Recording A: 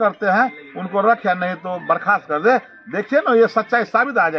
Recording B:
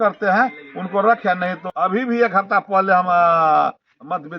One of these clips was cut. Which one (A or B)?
B